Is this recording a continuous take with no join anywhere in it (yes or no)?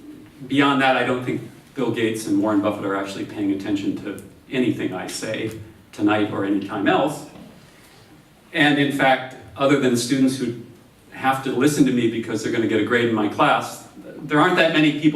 no